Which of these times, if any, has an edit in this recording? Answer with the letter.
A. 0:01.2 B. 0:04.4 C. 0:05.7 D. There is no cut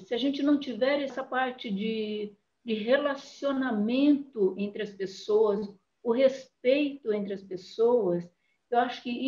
A